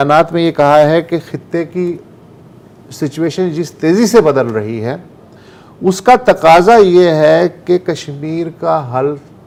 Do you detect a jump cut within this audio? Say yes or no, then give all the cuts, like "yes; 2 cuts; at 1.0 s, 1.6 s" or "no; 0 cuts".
no; 0 cuts